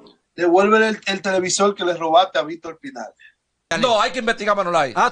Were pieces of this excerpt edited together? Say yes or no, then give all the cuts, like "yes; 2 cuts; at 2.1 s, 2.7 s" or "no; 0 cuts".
yes; 1 cut; at 3.7 s